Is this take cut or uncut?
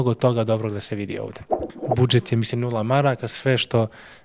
cut